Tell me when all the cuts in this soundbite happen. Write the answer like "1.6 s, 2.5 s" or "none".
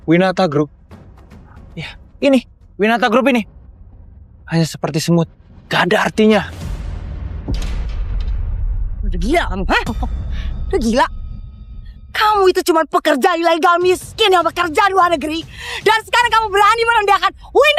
none

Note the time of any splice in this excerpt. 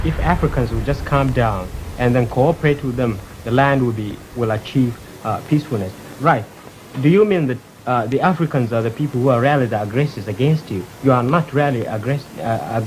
none

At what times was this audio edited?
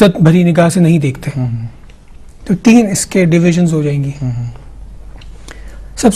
2.3 s

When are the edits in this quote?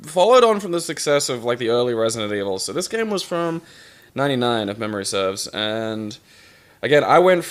2.4 s

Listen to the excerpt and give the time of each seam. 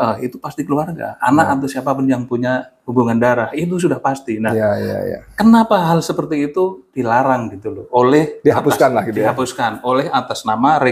none

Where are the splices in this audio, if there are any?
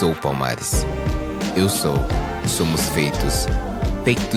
none

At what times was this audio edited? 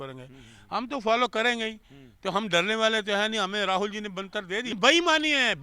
4.7 s

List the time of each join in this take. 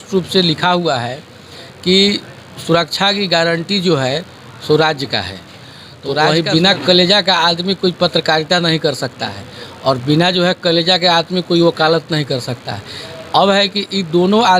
6.3 s

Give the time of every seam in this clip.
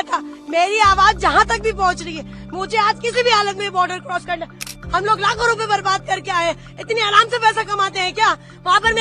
4.7 s

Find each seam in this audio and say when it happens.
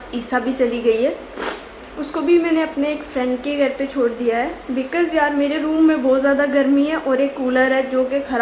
none

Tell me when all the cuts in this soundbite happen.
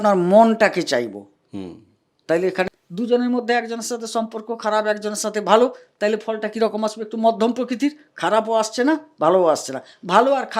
2.7 s

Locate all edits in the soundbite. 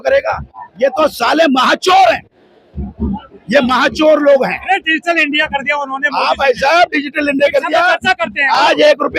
none

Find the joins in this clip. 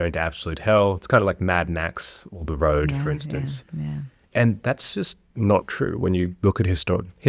none

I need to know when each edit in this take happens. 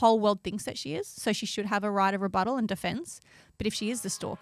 none

